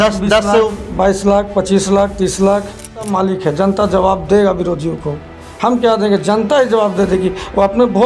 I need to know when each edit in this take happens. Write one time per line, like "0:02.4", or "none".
0:03.1